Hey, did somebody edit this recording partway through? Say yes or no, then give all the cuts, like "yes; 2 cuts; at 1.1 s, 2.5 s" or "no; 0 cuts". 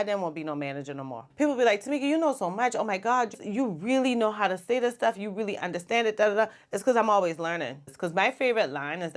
yes; 2 cuts; at 1.2 s, 7.8 s